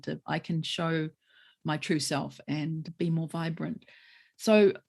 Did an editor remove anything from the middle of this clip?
yes; 1 cut; at 2.9 s

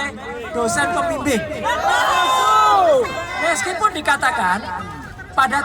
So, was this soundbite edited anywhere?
no; 0 cuts

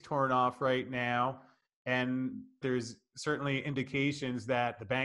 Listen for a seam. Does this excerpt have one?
yes; 1 cut; at 2.6 s

